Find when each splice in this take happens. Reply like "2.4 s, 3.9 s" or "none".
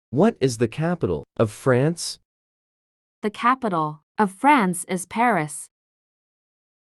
1.3 s